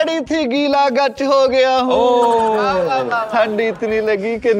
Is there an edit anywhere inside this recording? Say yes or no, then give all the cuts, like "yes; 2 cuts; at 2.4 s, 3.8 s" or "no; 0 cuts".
no; 0 cuts